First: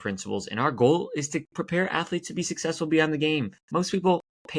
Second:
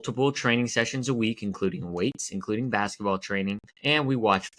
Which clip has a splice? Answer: second; 1 cut; at 3.7 s

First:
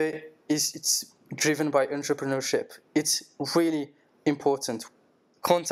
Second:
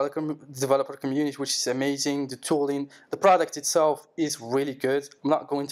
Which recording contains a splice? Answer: first; 1 cut; at 4.7 s

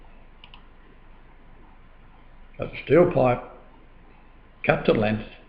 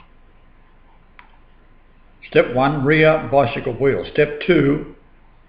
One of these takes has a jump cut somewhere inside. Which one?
first; 1 cut; at 3.4 s

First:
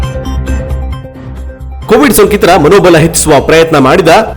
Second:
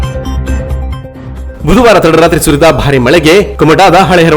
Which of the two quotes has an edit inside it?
second; 1 cut; at 1.4 s

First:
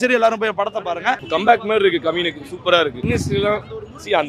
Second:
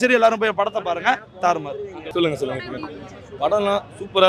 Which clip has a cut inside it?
first; 2 cuts; at 1.2 s, 3.0 s

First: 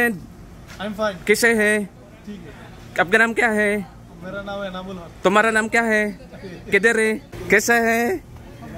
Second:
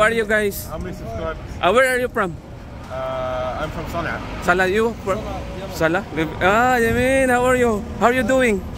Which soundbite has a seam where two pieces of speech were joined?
first; 1 cut; at 7.4 s

